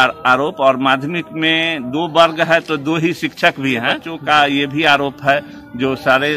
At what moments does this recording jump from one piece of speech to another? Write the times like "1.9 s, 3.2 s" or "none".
4.1 s